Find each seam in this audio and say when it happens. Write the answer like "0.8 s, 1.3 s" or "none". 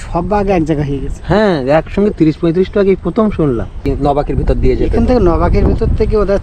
3.8 s